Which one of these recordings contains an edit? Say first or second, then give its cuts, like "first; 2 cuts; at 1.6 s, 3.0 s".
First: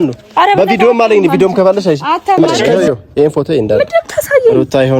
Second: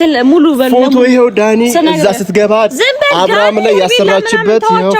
first; 1 cut; at 2.6 s